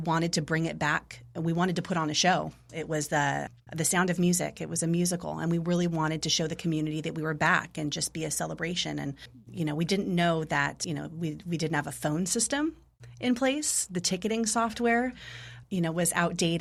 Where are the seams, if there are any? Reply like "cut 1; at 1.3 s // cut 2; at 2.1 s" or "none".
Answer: none